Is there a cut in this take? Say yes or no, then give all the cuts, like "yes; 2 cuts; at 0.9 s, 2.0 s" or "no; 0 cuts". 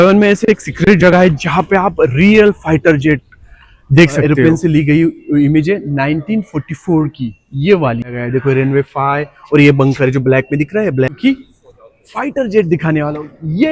yes; 3 cuts; at 4.2 s, 8.1 s, 11.2 s